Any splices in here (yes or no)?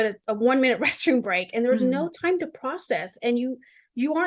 no